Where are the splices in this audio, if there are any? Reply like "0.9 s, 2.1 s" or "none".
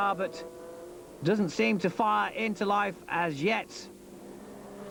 none